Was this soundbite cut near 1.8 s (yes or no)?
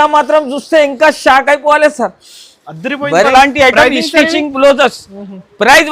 no